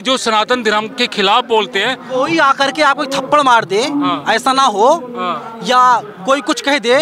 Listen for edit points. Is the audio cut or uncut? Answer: cut